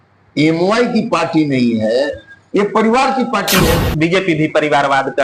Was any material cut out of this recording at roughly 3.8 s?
yes; 1 cut; at 3.8 s

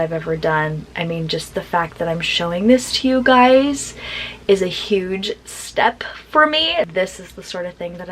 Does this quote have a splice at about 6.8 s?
yes; 1 cut; at 6.8 s

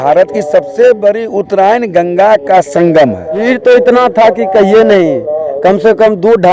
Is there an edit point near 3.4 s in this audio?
yes; 1 cut; at 3.4 s

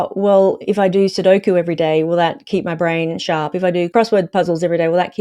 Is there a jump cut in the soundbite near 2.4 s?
no; 1 cut; at 3.9 s

